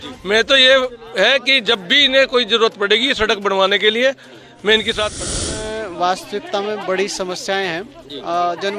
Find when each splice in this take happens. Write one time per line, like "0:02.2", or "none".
0:05.2